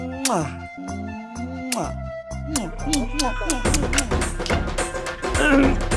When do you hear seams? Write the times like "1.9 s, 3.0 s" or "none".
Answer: 2.4 s